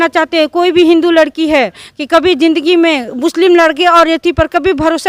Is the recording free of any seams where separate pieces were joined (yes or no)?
yes